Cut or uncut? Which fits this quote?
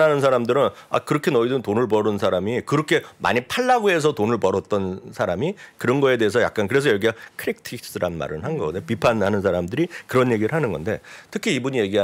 uncut